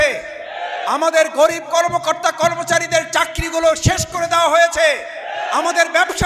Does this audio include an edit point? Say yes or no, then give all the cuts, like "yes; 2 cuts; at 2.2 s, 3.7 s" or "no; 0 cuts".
no; 0 cuts